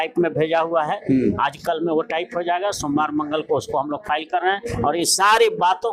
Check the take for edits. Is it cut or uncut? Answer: uncut